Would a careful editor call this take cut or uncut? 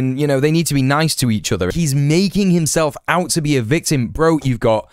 cut